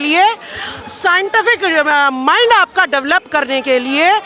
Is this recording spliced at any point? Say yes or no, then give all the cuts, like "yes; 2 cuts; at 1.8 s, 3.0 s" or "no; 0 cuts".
no; 0 cuts